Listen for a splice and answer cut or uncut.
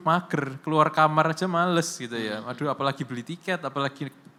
uncut